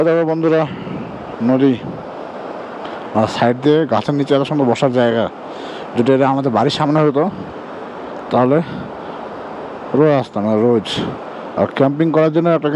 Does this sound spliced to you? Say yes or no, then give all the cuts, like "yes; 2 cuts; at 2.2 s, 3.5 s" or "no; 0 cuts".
no; 0 cuts